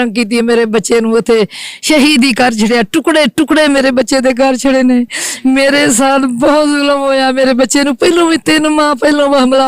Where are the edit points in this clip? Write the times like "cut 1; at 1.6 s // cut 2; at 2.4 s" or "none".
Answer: none

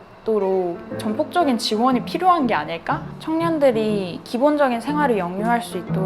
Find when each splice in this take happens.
cut 1; at 3.1 s

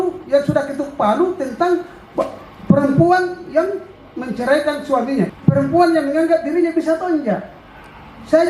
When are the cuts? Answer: none

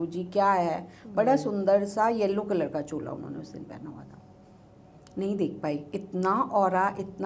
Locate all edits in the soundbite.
none

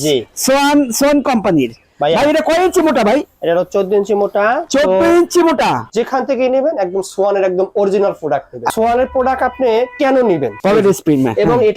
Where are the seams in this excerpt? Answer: cut 1; at 5.8 s // cut 2; at 8.7 s // cut 3; at 10.5 s

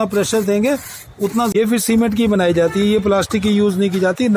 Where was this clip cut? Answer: cut 1; at 1.5 s

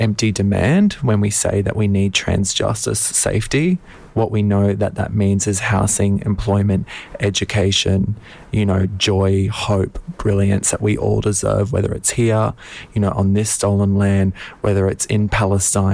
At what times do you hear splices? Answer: none

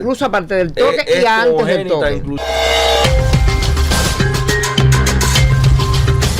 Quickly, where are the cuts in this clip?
cut 1; at 2.4 s

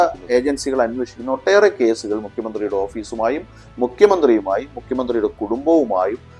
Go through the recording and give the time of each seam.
none

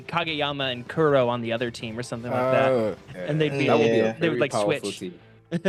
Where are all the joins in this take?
none

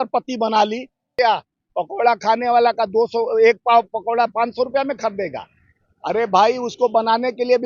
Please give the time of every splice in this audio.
cut 1; at 1.1 s

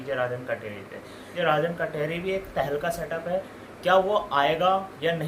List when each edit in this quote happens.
cut 1; at 1.2 s

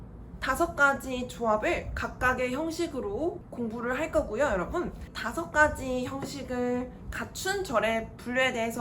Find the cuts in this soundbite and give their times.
cut 1; at 3.4 s // cut 2; at 5.1 s

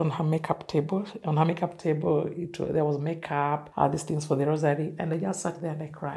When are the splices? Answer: cut 1; at 3.7 s

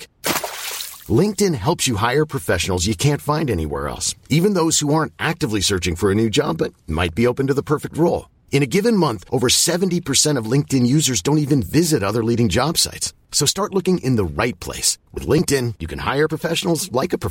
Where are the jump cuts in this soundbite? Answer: none

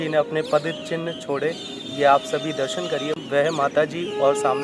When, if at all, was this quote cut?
cut 1; at 3.2 s

